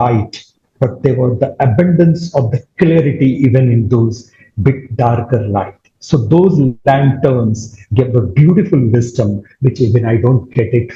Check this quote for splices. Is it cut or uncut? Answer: uncut